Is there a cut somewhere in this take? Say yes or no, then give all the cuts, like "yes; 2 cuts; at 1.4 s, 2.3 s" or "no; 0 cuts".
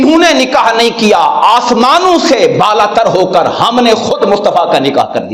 no; 0 cuts